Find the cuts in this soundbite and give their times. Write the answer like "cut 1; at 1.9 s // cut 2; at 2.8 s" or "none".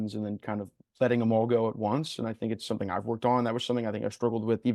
none